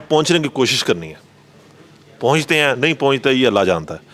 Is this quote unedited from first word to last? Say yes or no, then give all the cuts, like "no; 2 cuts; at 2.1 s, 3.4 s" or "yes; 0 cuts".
yes; 0 cuts